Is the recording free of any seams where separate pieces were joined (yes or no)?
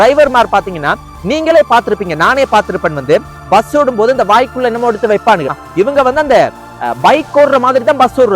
no